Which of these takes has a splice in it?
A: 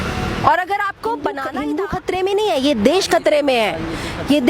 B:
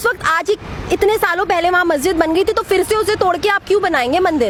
A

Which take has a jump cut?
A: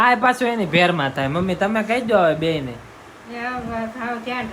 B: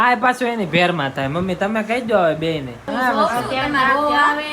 B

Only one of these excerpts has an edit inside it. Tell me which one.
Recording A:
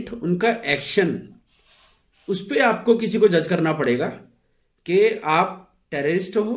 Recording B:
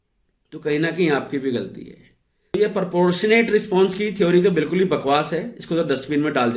B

